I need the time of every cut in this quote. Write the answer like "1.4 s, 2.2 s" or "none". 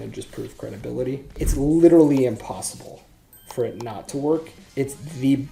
1.4 s, 4.6 s

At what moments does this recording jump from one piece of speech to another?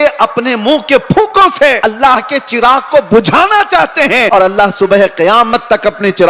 1.8 s, 4.3 s

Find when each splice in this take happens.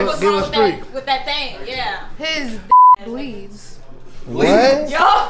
none

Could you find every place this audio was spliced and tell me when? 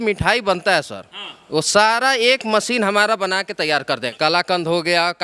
4.1 s

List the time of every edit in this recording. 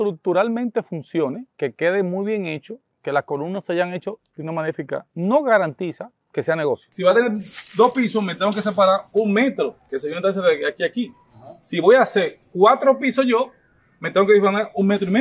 6.9 s

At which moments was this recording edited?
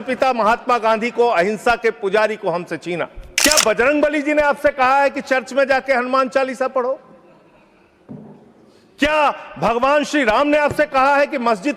3.2 s

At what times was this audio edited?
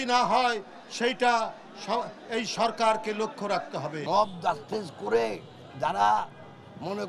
3.9 s

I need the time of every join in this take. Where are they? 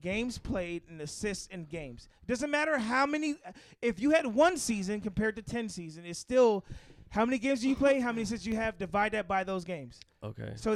none

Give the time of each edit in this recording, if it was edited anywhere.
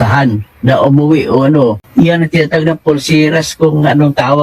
1.8 s

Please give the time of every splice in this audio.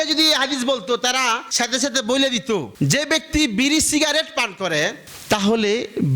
1.5 s, 2.7 s

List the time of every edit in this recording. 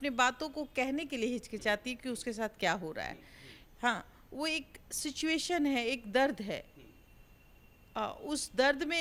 none

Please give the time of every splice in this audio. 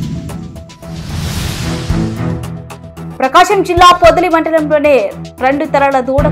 2.3 s

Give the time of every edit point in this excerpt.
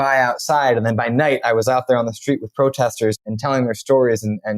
3.3 s

